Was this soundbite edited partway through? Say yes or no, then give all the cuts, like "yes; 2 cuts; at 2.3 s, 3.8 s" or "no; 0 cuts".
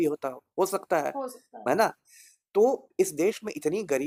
no; 0 cuts